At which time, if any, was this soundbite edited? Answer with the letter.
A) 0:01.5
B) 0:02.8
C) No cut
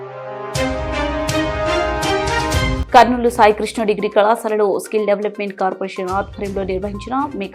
B